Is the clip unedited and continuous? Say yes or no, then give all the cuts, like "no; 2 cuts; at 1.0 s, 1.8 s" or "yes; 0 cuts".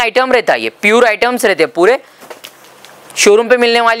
yes; 0 cuts